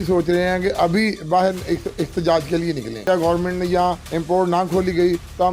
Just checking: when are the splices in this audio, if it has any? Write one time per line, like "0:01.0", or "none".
0:03.1
0:04.1